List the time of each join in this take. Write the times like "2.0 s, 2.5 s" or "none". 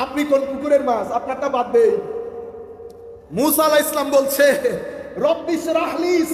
none